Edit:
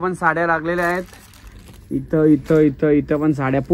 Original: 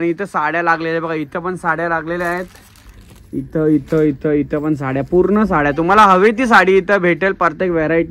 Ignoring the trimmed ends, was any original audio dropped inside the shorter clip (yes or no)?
no